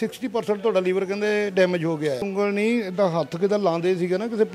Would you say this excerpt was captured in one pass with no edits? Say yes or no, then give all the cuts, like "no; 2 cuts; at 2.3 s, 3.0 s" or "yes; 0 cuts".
no; 1 cut; at 2.3 s